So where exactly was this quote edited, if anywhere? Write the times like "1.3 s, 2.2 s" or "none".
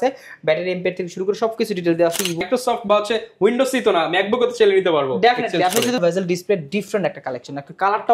2.4 s, 6.0 s